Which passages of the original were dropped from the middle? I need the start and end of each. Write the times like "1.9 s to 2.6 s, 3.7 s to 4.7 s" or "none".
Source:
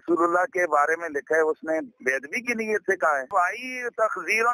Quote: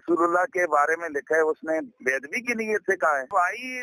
none